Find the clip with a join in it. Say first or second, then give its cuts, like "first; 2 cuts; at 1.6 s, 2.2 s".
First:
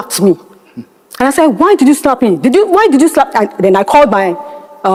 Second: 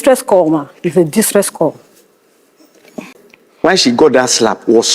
second; 1 cut; at 3.1 s